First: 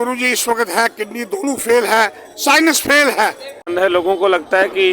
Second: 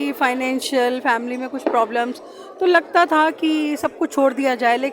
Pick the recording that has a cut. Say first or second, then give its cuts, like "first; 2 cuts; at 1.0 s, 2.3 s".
first; 1 cut; at 3.6 s